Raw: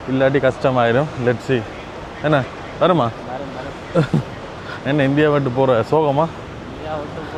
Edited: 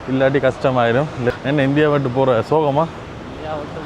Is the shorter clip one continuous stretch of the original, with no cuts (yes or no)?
no